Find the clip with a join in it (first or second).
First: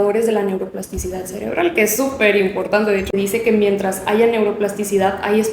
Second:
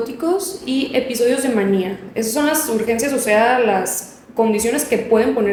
first